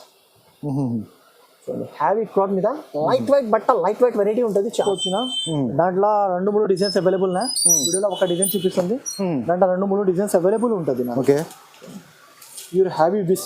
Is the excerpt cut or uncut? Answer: cut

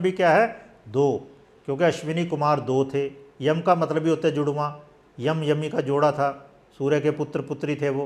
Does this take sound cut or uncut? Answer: uncut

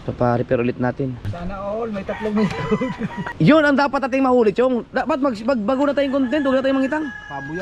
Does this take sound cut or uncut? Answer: cut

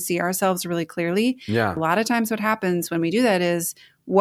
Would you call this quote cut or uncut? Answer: cut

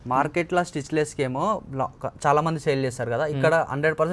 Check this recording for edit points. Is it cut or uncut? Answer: uncut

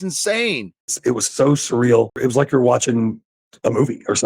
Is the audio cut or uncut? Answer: cut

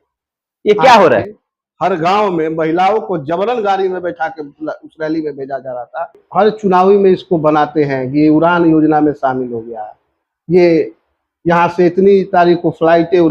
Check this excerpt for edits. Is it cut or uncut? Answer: cut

